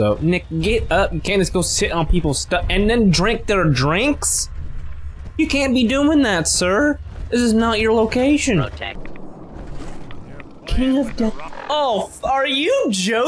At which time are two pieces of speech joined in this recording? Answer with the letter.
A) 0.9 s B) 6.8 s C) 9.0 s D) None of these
C